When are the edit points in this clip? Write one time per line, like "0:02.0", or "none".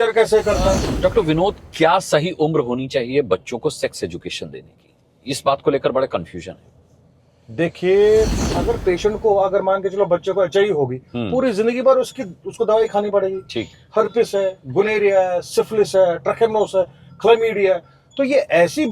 0:00.9
0:08.5